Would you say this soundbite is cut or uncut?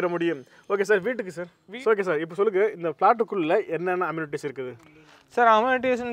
cut